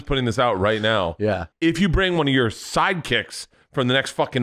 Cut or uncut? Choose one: cut